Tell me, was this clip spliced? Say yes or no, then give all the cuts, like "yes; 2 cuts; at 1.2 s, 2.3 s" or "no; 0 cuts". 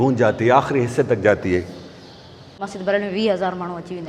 yes; 1 cut; at 2.6 s